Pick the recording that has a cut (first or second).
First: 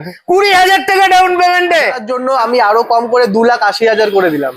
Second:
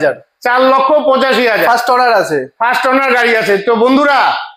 first